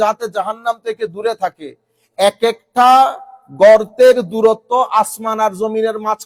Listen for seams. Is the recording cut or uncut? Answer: uncut